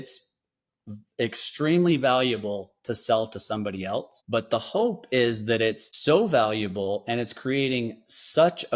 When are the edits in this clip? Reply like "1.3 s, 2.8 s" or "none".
4.2 s, 5.9 s